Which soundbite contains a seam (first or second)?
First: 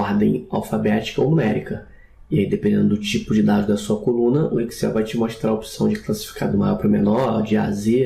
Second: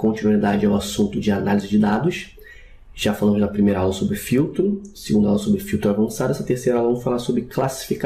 second